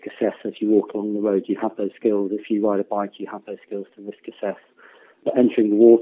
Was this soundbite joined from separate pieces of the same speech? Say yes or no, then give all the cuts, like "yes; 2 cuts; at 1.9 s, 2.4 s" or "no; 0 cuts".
no; 0 cuts